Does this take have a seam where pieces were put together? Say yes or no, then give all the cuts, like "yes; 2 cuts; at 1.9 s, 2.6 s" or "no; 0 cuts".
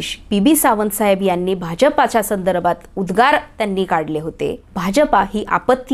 yes; 1 cut; at 4.7 s